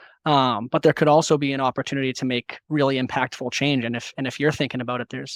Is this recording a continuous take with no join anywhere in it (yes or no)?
yes